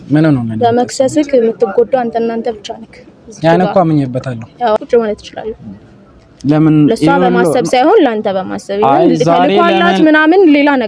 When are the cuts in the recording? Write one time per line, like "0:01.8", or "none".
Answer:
0:04.8